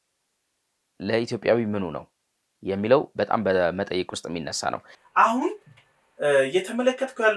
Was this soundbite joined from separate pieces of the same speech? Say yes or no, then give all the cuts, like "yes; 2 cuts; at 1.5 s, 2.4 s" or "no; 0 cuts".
yes; 1 cut; at 4.9 s